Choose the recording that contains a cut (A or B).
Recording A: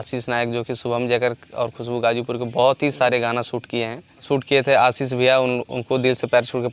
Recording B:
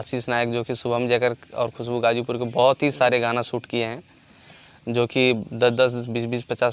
A